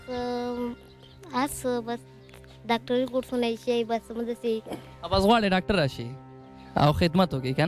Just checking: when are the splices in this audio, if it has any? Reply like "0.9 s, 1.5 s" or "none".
none